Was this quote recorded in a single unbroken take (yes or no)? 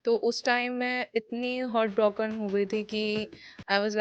yes